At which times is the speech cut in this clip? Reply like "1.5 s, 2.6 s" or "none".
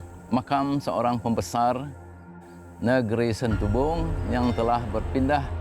4.1 s